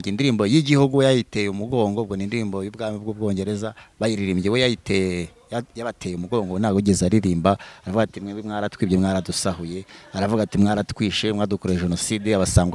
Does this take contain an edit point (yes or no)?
no